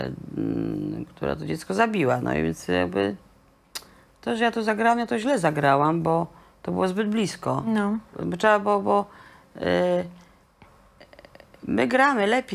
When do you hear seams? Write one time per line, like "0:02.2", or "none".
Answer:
none